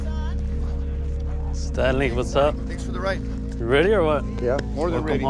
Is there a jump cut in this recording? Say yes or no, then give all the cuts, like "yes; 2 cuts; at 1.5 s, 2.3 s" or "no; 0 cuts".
no; 0 cuts